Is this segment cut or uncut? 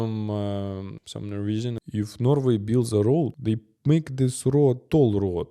cut